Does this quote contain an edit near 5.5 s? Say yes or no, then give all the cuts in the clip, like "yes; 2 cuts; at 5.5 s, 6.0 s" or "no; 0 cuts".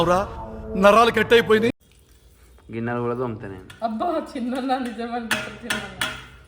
no; 1 cut; at 1.7 s